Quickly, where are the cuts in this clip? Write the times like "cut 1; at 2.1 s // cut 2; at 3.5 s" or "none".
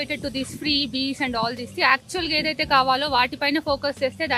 none